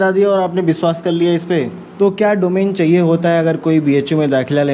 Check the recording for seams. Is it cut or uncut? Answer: cut